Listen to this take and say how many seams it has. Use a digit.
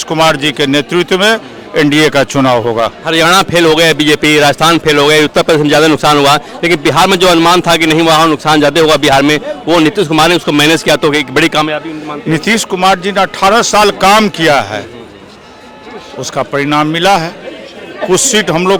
0